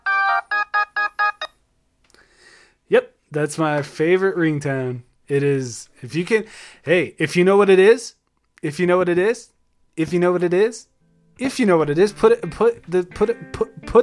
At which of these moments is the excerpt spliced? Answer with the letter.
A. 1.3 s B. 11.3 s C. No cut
A